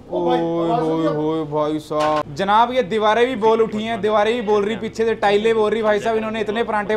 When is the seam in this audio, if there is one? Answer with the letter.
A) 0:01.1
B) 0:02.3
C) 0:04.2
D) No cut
B